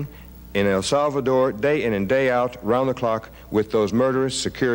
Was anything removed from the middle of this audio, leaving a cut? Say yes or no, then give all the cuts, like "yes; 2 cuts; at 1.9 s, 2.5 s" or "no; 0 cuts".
no; 0 cuts